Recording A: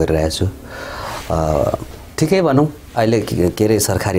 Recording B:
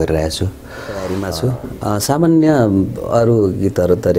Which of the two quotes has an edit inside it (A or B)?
B